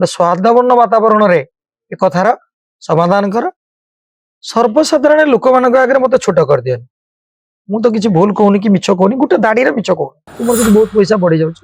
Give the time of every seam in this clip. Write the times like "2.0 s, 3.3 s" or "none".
10.3 s

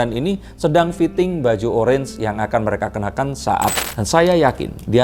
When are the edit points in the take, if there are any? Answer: 3.8 s

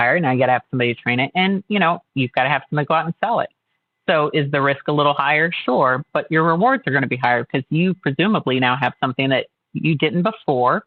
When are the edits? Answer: none

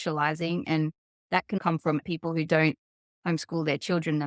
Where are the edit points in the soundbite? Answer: 1.8 s

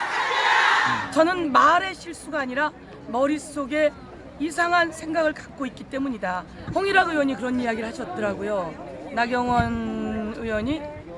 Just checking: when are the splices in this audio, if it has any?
1.0 s, 6.6 s

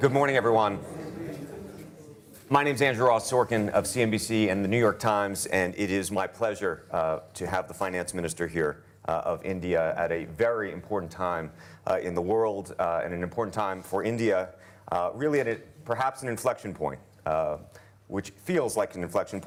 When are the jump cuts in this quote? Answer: none

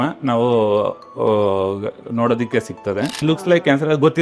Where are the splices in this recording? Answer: 3.2 s

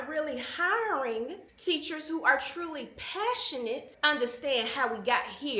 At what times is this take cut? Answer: 1.5 s, 3.9 s

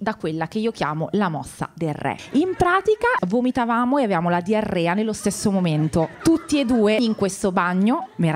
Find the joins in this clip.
2.2 s, 3.2 s, 7.0 s

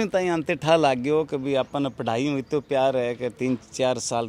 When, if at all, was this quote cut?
none

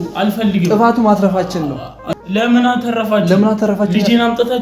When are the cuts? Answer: 2.0 s

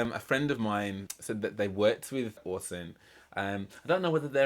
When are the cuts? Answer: 1.1 s, 2.4 s

